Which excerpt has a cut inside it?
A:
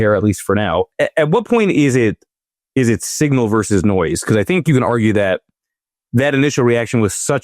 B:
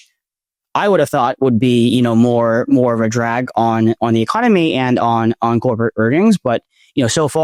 A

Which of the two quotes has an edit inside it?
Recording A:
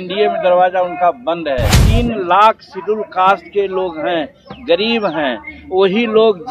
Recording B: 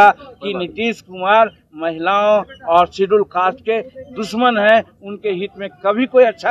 A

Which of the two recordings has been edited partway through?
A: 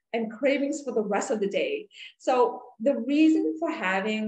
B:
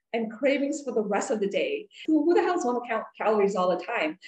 B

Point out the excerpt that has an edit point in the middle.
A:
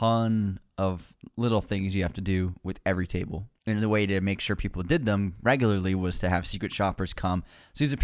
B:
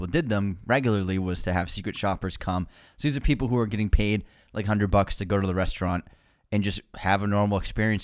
A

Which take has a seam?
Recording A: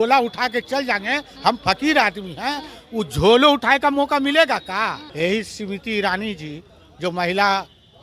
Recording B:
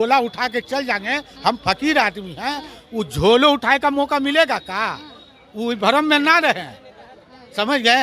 A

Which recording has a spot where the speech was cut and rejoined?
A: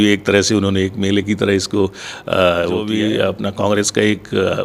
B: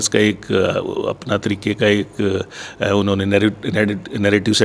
A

